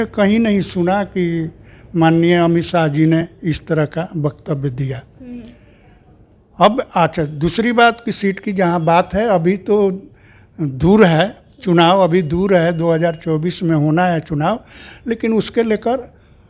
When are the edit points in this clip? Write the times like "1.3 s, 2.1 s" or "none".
none